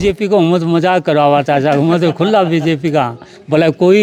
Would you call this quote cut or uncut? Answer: uncut